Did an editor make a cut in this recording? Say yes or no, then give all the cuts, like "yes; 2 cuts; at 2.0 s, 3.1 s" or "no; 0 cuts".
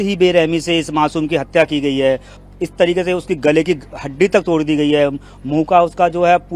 yes; 1 cut; at 2.4 s